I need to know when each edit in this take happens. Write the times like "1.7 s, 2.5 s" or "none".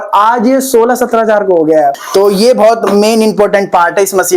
2.0 s